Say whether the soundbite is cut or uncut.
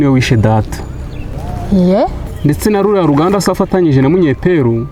uncut